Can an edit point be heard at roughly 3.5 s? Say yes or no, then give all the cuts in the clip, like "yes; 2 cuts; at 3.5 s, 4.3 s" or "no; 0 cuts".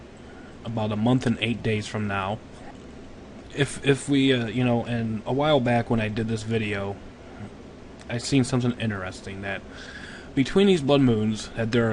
yes; 1 cut; at 3.5 s